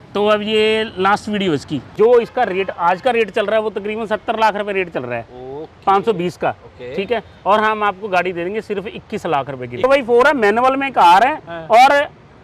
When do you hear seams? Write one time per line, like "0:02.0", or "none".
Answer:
0:01.8
0:09.8